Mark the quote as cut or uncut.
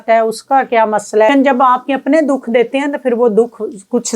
cut